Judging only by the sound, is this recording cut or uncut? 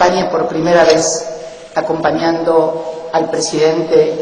uncut